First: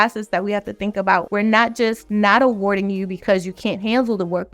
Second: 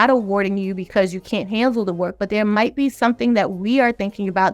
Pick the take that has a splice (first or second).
first